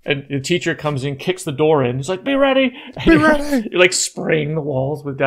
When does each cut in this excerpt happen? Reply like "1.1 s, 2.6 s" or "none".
none